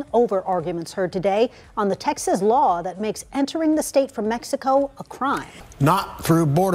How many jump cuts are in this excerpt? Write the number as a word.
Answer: one